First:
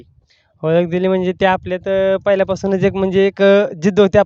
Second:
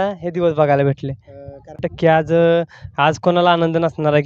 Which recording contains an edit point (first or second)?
second